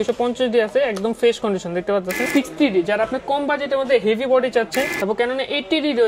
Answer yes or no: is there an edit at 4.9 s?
yes